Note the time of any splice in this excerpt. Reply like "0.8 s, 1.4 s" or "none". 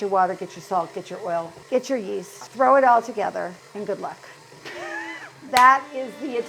2.4 s, 3.6 s